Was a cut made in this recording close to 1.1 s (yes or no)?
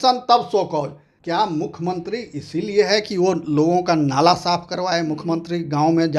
yes